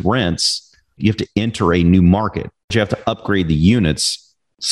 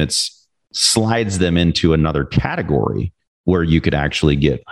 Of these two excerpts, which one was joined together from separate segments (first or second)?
first